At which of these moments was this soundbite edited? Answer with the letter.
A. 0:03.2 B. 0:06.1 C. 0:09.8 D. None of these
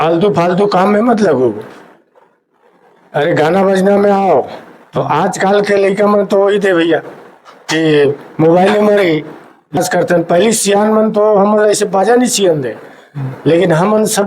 C